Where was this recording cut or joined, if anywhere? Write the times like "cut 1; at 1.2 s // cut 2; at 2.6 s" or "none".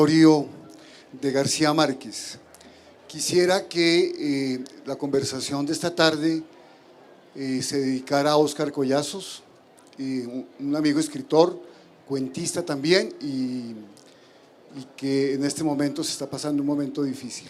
none